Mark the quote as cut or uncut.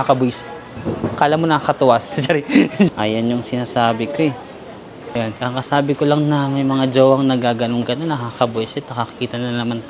cut